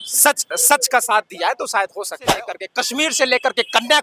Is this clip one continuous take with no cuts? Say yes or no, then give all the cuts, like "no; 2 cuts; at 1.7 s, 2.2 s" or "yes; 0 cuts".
no; 1 cut; at 2.3 s